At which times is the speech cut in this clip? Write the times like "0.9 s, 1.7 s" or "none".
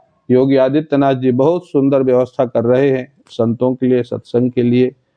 none